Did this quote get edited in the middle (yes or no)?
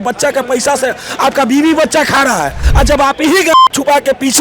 yes